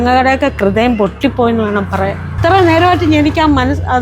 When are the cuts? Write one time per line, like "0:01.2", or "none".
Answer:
0:02.3